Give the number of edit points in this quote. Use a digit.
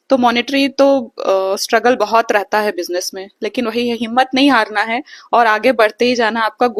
0